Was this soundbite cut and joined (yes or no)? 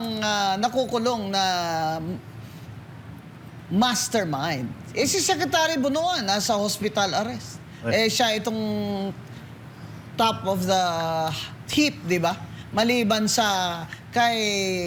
no